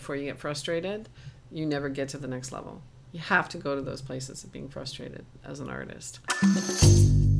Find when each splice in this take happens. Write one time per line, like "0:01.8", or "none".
0:06.3